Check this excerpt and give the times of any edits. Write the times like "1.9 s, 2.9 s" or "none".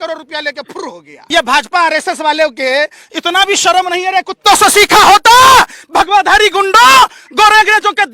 1.1 s